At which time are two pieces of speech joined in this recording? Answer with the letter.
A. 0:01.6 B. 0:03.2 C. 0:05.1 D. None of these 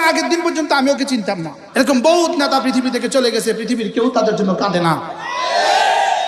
A